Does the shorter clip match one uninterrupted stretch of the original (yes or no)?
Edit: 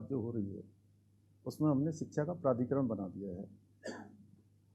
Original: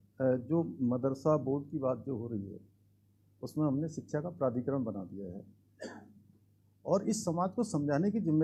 yes